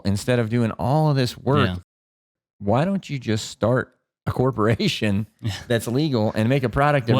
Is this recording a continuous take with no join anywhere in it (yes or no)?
no